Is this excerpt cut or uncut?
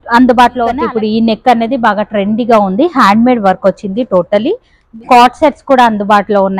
cut